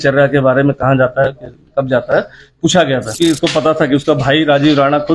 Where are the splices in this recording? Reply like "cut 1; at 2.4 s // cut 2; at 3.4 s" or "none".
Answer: cut 1; at 3.2 s